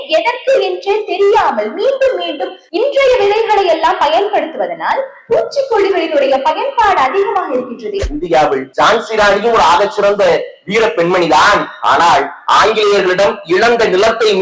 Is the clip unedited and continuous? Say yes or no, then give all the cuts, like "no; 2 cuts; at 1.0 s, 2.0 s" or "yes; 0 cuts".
no; 2 cuts; at 2.6 s, 8.0 s